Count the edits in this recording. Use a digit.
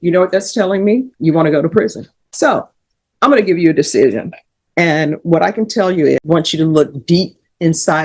1